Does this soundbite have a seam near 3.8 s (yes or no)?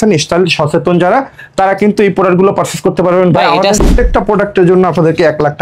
yes